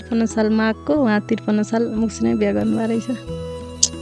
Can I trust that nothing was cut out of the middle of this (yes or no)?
yes